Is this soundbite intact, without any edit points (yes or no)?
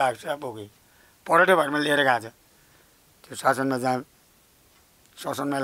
yes